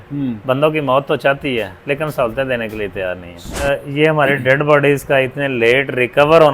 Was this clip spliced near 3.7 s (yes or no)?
yes